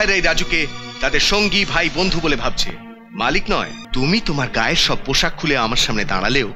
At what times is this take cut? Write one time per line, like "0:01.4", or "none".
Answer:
0:03.8